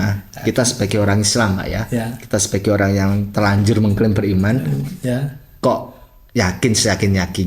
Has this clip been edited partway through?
no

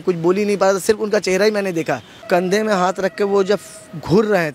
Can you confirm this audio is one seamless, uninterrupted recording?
no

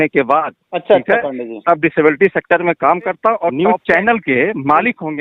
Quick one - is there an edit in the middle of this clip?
yes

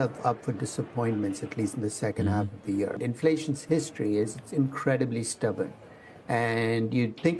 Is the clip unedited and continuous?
no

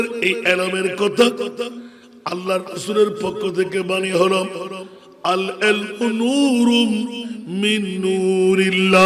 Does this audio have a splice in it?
no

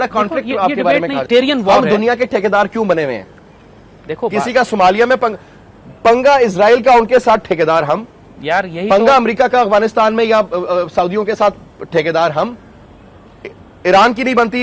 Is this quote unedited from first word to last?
no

